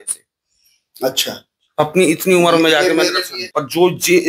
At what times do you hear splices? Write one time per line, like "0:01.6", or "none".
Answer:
0:03.3